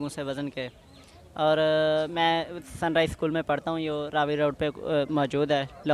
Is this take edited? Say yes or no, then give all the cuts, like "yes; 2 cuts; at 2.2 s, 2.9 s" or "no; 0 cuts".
no; 0 cuts